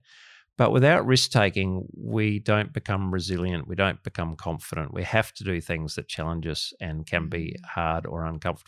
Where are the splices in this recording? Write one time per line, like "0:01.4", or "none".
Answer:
none